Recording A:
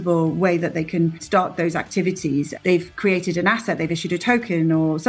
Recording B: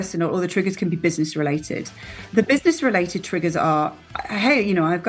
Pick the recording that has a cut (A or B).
A